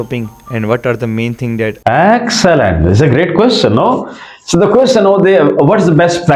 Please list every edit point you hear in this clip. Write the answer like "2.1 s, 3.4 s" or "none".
1.8 s